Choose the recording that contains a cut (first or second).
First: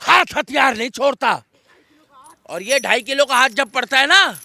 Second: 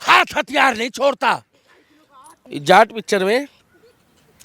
second